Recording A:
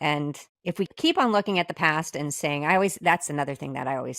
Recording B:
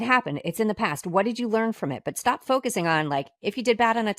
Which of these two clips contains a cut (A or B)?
A